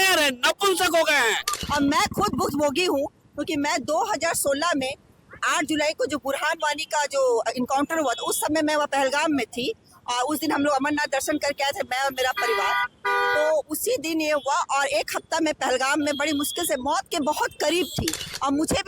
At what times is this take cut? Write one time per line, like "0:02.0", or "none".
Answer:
0:01.5